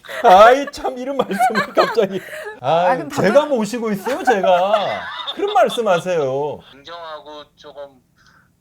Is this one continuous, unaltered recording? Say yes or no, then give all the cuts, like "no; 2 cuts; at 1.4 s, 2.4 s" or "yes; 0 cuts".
no; 1 cut; at 6.7 s